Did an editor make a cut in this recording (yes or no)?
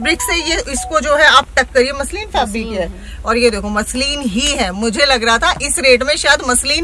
no